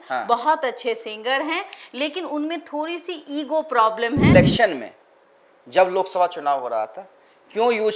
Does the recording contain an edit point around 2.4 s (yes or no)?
no